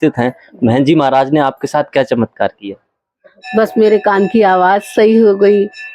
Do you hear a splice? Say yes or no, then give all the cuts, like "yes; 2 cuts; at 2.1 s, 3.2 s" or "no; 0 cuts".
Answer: no; 0 cuts